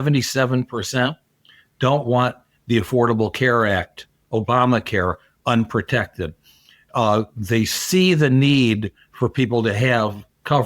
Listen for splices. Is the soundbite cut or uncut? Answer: uncut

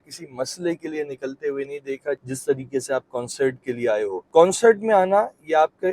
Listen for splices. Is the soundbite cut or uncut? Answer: uncut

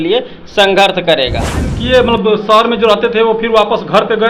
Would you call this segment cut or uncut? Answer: cut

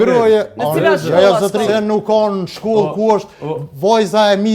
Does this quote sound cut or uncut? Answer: cut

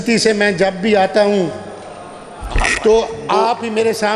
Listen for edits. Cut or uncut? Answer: uncut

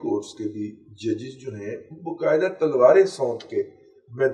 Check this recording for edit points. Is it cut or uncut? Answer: uncut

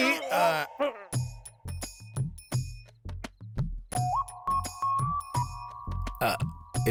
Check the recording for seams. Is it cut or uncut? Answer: uncut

